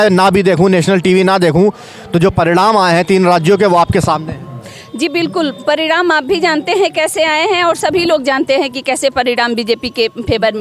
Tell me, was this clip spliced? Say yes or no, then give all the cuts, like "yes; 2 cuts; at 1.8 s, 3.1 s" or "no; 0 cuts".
no; 0 cuts